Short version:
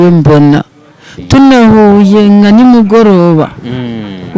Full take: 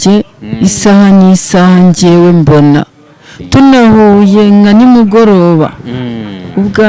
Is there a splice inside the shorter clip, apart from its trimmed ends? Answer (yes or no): no